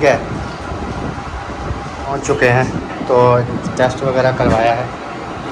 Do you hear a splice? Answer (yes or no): yes